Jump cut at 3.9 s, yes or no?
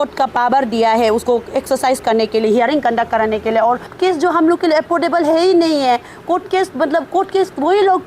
yes